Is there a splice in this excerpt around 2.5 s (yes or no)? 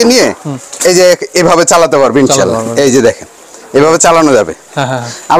no